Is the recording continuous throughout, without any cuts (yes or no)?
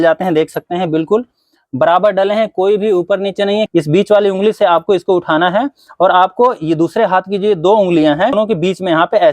no